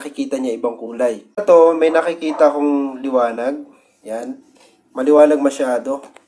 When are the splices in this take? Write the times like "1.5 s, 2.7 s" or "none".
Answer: 1.3 s